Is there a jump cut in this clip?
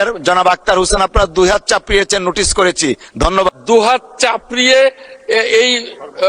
yes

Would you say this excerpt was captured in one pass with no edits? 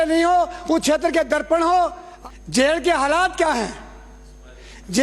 no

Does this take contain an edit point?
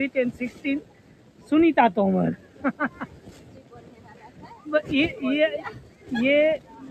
no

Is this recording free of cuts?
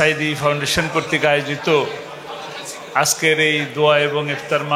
yes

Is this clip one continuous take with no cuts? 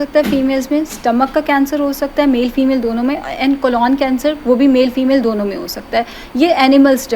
yes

